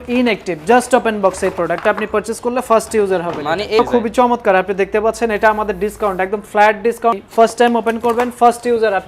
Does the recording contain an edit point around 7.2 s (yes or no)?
yes